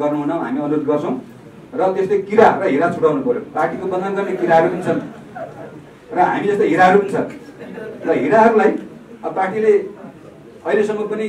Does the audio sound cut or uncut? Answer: uncut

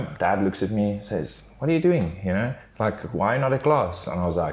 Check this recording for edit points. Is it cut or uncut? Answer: uncut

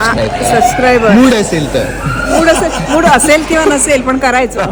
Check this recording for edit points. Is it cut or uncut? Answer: uncut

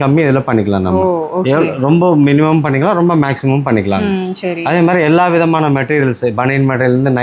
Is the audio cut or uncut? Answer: uncut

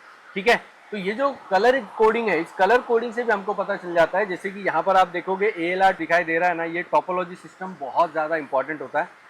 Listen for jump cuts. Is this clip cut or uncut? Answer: cut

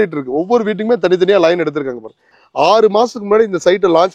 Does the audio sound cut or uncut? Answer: cut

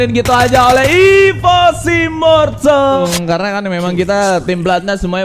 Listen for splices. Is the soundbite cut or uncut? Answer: cut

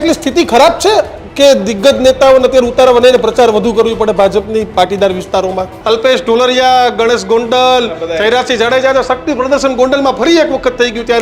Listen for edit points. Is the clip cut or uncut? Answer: cut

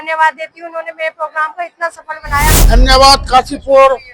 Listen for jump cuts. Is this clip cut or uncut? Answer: cut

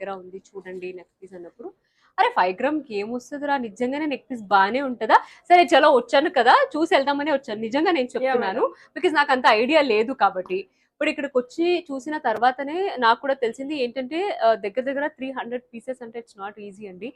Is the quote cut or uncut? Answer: uncut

